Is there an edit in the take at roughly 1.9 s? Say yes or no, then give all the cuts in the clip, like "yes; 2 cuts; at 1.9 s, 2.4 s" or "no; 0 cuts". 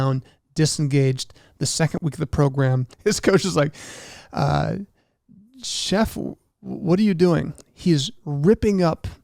yes; 2 cuts; at 1.9 s, 2.9 s